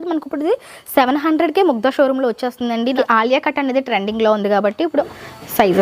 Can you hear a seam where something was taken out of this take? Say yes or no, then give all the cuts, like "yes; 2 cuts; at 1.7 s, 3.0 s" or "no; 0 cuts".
yes; 2 cuts; at 3.0 s, 5.1 s